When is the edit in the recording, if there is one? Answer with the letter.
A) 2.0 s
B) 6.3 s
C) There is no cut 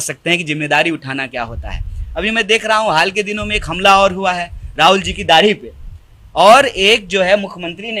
C